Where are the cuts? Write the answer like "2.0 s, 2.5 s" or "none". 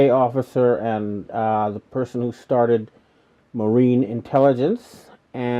1.8 s